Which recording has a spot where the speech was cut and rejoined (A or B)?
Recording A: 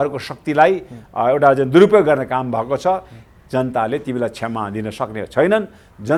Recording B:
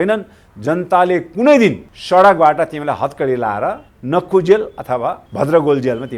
B